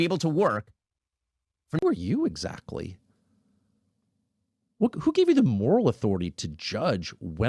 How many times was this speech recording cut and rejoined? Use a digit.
1